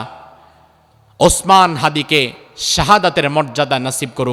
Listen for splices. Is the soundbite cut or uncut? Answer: uncut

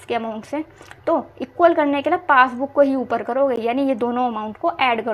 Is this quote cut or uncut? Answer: uncut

